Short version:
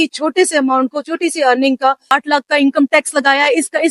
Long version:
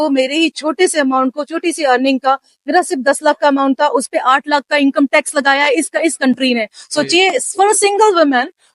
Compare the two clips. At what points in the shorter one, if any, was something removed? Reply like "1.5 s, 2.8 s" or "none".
2.1 s